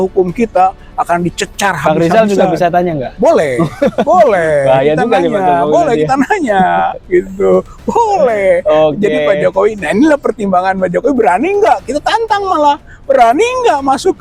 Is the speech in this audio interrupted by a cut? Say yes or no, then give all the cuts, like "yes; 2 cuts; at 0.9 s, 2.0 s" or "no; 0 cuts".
no; 0 cuts